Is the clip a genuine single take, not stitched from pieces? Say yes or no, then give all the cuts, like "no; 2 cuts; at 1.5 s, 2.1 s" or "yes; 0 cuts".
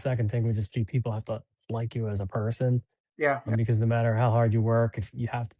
yes; 0 cuts